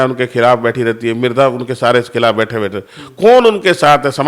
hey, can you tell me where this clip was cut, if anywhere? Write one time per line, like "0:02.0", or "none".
none